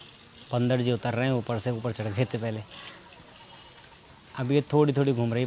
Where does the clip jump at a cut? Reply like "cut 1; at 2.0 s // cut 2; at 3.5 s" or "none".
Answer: none